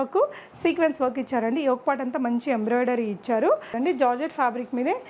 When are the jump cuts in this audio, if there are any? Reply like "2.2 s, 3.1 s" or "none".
3.7 s